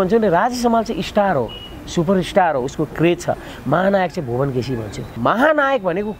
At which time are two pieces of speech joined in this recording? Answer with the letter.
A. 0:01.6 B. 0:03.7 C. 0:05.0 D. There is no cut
C